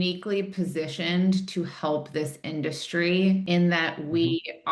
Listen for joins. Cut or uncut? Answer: cut